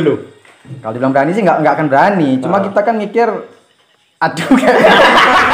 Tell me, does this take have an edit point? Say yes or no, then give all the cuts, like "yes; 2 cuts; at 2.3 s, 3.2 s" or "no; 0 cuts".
no; 0 cuts